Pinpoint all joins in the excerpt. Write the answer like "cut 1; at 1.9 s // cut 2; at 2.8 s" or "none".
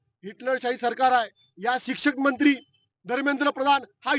cut 1; at 1.4 s

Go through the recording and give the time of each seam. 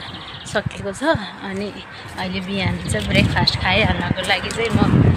none

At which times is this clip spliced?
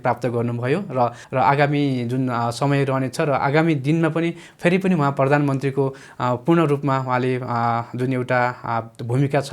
cut 1; at 1.2 s

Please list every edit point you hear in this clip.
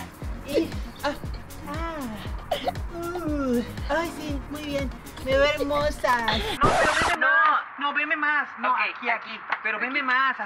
cut 1; at 6.5 s

